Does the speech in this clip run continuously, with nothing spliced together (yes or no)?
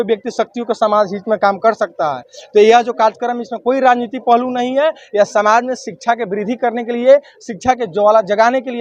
yes